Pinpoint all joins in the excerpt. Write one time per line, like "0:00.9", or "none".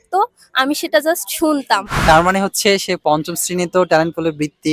0:01.9